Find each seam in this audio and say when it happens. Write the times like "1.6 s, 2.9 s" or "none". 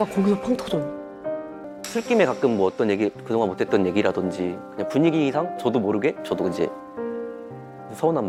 1.6 s